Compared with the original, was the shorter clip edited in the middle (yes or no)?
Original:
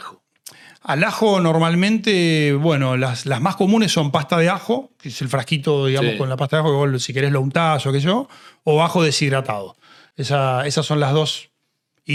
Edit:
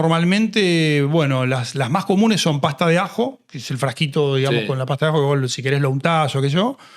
no